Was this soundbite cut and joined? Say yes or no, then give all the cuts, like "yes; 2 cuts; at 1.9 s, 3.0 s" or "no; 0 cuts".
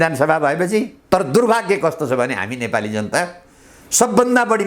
yes; 1 cut; at 1.0 s